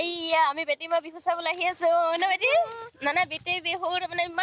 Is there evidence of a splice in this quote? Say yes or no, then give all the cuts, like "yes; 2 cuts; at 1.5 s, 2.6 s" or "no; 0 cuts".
no; 0 cuts